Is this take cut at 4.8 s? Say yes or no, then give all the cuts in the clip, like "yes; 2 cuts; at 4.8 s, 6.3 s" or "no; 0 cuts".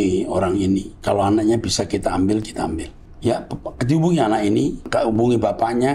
yes; 2 cuts; at 0.9 s, 4.8 s